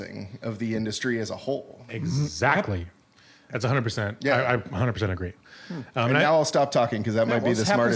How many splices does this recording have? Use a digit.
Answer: 0